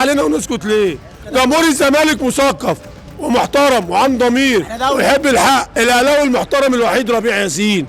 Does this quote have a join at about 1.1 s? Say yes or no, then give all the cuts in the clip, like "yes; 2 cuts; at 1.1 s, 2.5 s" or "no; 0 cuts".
yes; 2 cuts; at 1.1 s, 5.7 s